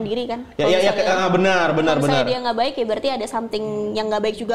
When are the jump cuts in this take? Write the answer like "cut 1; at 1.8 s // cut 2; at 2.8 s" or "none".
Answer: none